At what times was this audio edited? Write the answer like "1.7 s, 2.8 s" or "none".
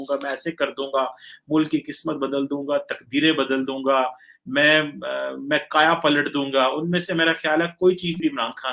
none